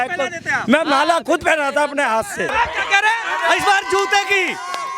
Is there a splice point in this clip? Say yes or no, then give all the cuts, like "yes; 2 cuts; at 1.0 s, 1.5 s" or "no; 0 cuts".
yes; 1 cut; at 2.5 s